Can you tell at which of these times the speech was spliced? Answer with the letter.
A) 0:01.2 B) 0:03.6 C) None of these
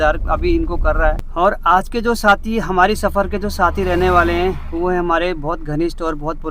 A